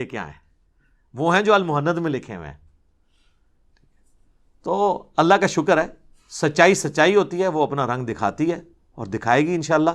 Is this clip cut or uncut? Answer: uncut